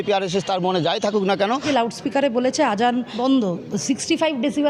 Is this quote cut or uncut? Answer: cut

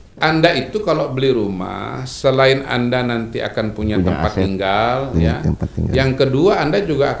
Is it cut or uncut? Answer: uncut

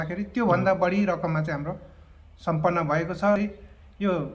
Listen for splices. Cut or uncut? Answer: cut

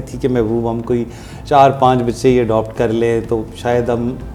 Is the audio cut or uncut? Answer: uncut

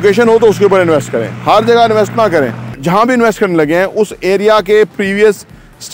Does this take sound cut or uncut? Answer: cut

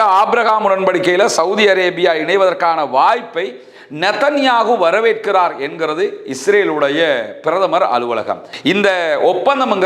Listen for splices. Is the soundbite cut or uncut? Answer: cut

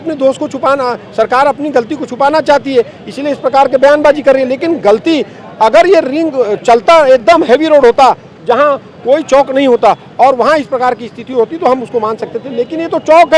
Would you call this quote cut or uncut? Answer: uncut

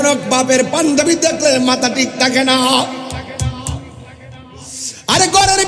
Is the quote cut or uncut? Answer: uncut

